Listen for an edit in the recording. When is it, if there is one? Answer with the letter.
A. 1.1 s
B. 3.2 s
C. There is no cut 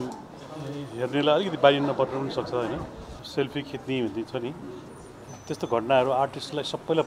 B